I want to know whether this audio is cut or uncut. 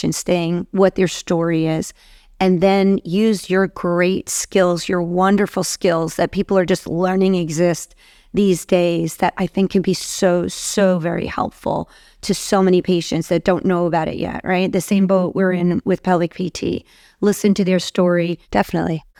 uncut